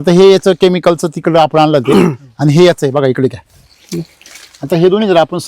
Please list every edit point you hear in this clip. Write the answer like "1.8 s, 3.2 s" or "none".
none